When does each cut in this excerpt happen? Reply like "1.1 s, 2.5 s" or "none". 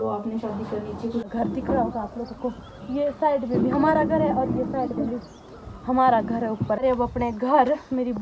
1.3 s, 6.8 s